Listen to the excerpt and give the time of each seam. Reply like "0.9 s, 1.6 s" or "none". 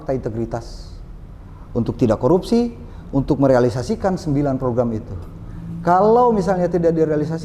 none